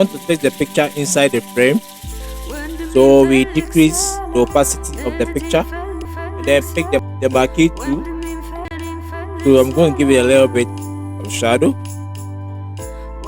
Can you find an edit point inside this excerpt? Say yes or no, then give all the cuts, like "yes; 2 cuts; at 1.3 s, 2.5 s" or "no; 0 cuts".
yes; 3 cuts; at 6.1 s, 7.1 s, 8.6 s